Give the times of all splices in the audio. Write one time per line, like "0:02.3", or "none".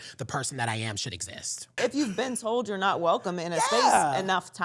0:01.8